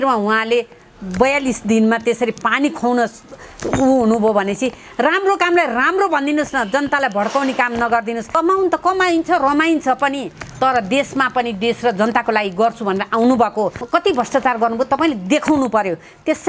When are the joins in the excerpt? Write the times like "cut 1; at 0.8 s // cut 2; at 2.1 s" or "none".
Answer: cut 1; at 8.3 s // cut 2; at 13.8 s